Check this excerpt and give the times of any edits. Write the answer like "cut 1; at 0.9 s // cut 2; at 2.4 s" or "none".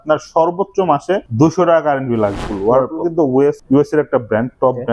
cut 1; at 1.3 s // cut 2; at 2.5 s // cut 3; at 3.6 s